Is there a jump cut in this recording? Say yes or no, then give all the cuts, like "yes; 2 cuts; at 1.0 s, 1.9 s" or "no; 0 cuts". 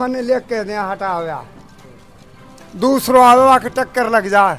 no; 0 cuts